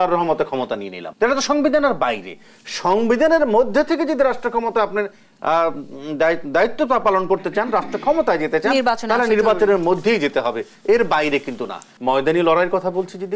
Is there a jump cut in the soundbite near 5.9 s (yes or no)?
no